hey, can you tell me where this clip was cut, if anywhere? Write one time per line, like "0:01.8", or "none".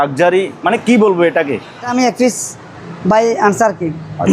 0:01.9